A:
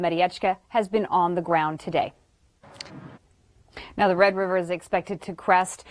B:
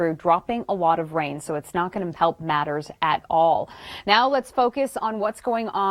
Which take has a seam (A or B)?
A